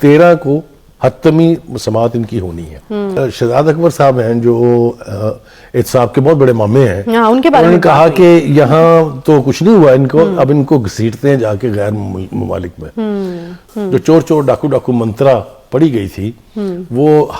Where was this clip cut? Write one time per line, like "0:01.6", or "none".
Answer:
0:03.2
0:13.6

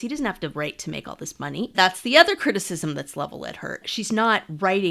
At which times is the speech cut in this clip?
0:01.7
0:03.8

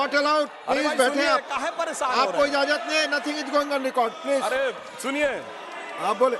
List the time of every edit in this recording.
none

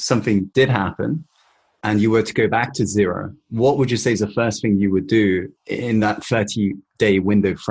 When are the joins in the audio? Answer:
none

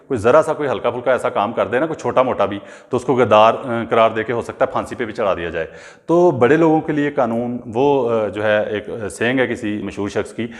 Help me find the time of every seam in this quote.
none

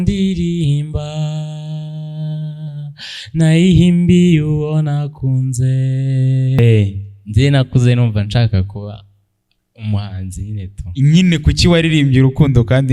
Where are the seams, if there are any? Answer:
0:06.6

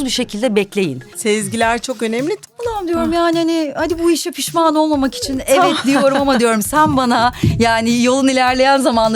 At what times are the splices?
0:01.1
0:02.4

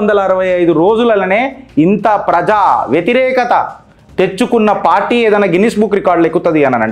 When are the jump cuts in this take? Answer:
none

